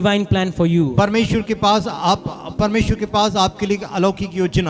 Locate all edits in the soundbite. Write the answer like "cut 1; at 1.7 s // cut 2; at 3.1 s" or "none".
none